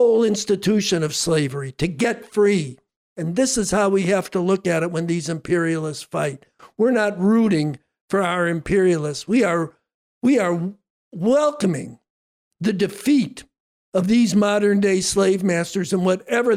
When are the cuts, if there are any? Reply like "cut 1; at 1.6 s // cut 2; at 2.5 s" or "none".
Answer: none